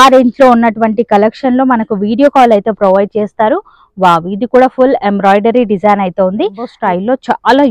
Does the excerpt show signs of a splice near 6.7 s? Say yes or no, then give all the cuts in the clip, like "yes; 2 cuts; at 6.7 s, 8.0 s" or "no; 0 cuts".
yes; 1 cut; at 6.7 s